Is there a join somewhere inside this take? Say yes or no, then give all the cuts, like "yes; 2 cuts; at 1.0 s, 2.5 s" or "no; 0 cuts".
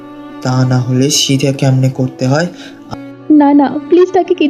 yes; 1 cut; at 2.7 s